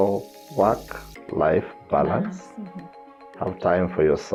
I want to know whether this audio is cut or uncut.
uncut